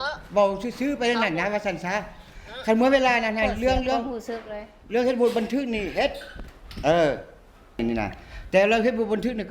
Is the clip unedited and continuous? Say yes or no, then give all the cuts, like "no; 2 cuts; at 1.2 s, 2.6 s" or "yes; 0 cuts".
no; 1 cut; at 7.8 s